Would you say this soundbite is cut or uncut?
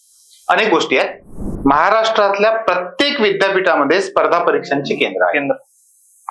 cut